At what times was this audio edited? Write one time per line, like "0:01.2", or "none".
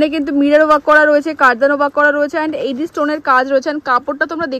none